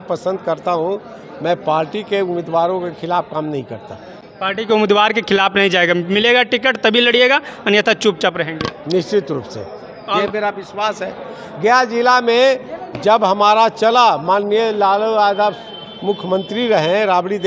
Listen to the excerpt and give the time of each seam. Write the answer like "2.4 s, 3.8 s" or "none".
none